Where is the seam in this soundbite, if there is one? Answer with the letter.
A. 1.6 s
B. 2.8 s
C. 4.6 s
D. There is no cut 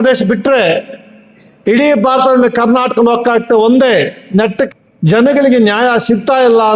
C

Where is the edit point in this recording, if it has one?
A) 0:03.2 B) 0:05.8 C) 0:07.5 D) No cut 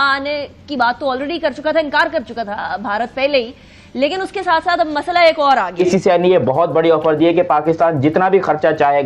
B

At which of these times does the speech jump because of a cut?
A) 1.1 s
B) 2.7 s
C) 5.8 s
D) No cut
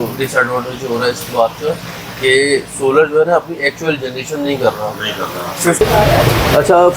C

